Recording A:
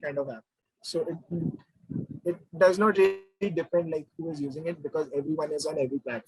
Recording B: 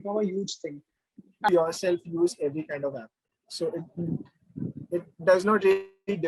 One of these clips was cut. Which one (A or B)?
B